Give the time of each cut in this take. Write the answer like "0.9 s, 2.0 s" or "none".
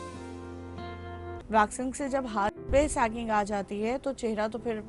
1.3 s

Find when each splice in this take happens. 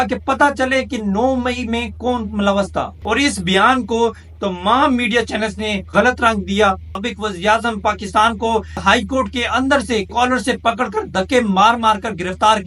2.9 s, 7.0 s, 8.8 s

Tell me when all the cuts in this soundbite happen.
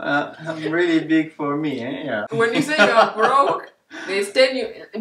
2.2 s

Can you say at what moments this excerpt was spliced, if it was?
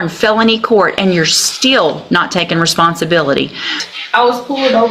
3.8 s

